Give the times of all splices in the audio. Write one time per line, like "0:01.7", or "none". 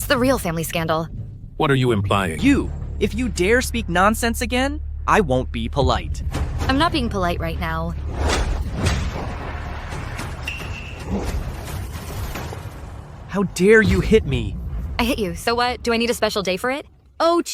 0:02.3